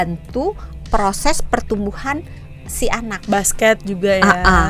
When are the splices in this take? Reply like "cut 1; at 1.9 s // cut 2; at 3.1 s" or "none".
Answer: none